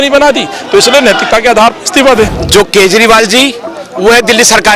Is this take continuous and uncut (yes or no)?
no